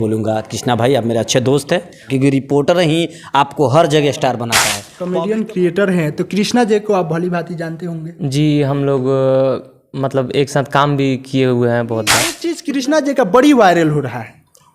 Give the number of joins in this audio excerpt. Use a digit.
3